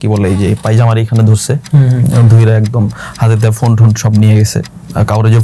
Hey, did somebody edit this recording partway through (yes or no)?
no